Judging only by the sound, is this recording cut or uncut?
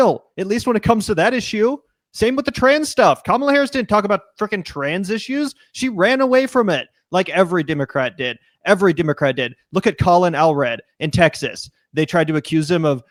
uncut